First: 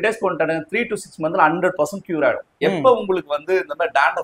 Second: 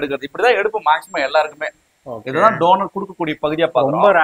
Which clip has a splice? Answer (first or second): first